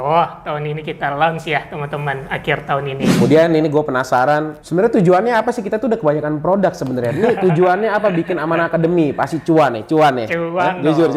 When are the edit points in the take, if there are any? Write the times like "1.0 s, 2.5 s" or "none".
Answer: 3.1 s, 4.6 s